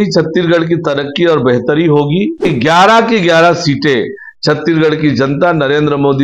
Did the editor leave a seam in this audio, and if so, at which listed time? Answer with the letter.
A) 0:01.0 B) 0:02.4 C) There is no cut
B